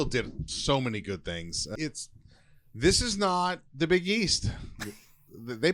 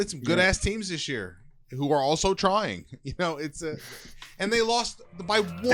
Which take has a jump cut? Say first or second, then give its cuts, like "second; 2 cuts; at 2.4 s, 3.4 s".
first; 1 cut; at 1.8 s